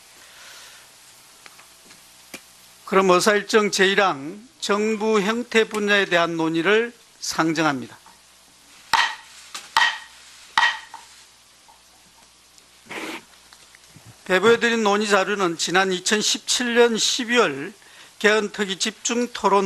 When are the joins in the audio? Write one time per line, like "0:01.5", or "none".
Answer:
0:11.7

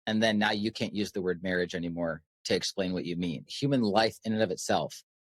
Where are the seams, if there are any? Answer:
0:03.5

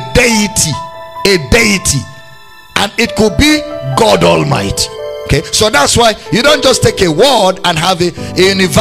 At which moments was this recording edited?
none

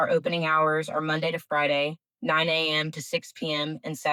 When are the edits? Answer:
none

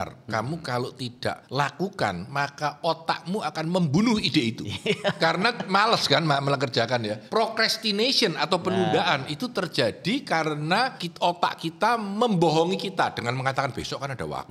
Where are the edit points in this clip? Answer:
0:01.4
0:07.2
0:11.0

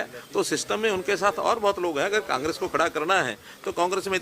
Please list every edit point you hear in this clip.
none

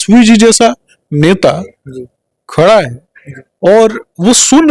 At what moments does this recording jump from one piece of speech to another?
none

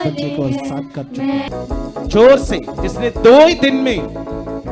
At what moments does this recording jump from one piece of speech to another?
0:01.5

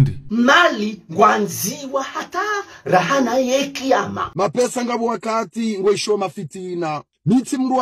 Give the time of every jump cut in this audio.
none

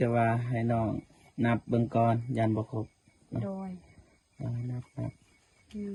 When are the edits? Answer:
none

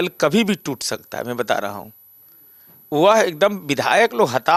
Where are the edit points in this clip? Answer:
none

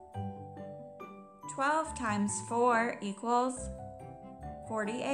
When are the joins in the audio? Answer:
0:01.6

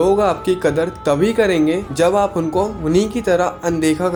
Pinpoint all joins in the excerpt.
none

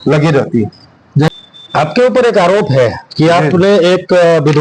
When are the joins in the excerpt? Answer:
0:01.3

